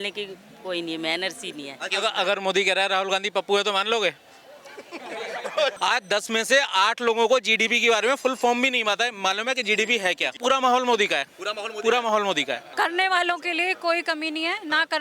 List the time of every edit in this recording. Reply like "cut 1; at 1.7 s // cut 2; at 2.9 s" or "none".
cut 1; at 1.9 s // cut 2; at 5.8 s // cut 3; at 10.4 s // cut 4; at 12.7 s